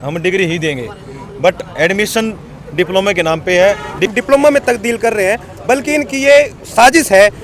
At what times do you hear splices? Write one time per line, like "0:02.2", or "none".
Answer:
0:04.1